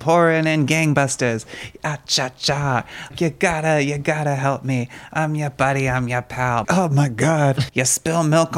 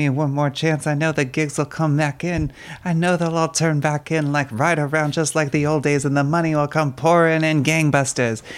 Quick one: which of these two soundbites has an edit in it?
first; 3 cuts; at 3.1 s, 6.6 s, 7.7 s

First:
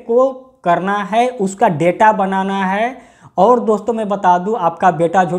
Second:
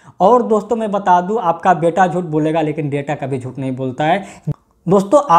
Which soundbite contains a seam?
second; 1 cut; at 4.4 s

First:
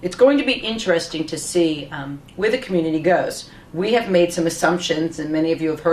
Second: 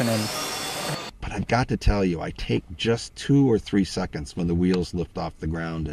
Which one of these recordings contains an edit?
second; 1 cut; at 1.1 s

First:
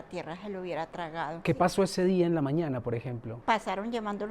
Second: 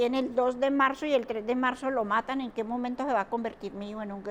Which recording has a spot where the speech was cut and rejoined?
first; 2 cuts; at 1.4 s, 3.3 s

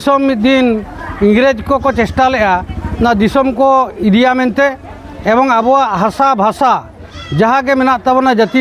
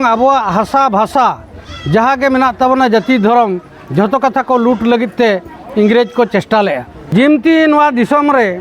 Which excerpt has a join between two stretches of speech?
second; 1 cut; at 6.9 s

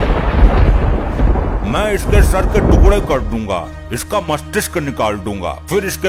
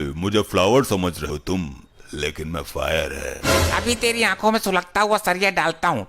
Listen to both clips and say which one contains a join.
second; 1 cut; at 1.3 s

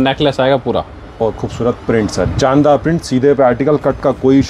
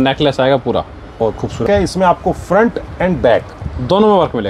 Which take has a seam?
second; 1 cut; at 1.6 s

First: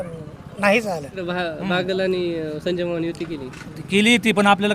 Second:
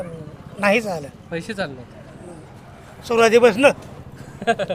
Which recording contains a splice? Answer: first; 1 cut; at 1.2 s

